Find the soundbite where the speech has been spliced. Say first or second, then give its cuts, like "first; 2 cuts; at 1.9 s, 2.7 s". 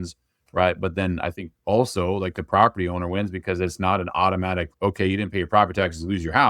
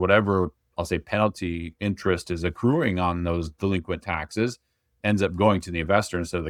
first; 1 cut; at 4.7 s